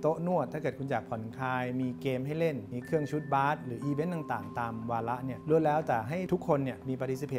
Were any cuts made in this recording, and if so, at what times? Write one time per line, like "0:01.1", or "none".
0:02.7
0:05.4
0:06.2

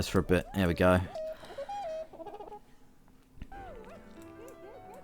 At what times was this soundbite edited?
0:01.2
0:03.5

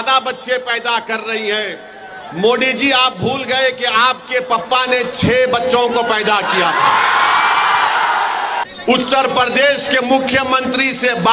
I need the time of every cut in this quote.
0:08.7

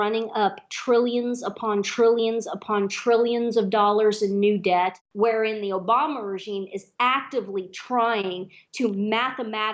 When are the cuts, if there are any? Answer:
0:05.0

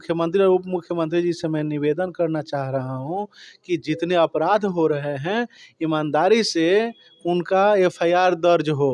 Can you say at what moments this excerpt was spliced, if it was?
none

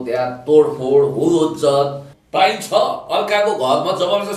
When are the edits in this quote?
0:02.0

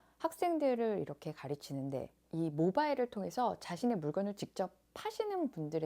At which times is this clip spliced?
0:02.2

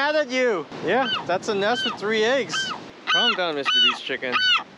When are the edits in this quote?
0:02.8

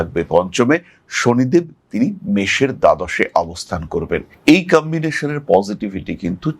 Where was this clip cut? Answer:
none

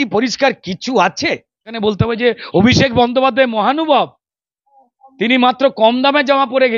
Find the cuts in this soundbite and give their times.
0:01.8

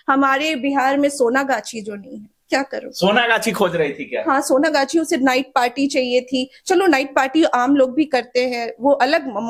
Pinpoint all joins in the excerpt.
none

